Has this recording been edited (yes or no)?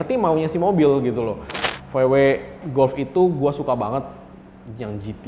yes